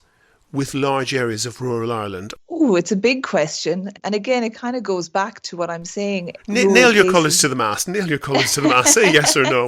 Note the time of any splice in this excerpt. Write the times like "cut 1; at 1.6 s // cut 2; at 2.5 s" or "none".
cut 1; at 2.3 s